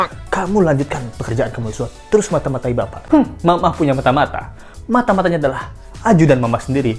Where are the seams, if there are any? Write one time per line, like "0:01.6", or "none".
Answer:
0:02.9